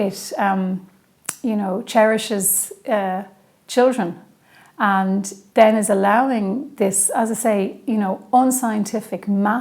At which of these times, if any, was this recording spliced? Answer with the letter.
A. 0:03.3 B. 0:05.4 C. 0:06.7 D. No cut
B